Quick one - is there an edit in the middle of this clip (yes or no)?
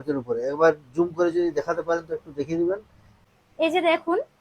yes